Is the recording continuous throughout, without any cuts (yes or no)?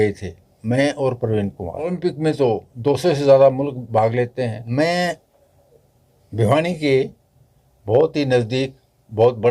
no